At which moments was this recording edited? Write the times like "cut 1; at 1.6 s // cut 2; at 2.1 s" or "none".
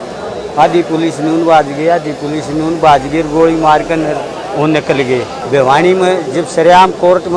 cut 1; at 5.4 s